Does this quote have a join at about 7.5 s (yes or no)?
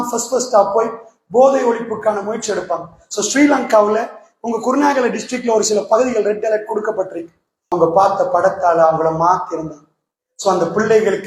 yes